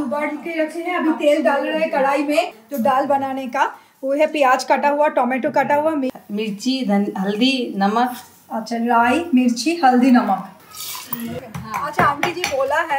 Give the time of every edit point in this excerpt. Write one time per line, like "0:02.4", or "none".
0:02.6
0:06.1
0:11.2